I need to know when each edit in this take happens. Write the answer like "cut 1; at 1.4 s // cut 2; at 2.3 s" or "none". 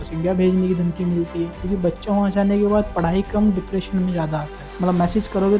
cut 1; at 1.6 s // cut 2; at 4.6 s